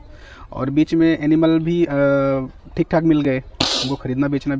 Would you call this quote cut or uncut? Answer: uncut